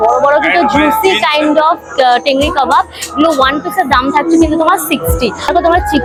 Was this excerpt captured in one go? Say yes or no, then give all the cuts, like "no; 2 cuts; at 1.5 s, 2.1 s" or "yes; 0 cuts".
yes; 0 cuts